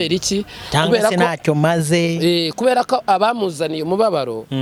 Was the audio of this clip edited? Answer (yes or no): no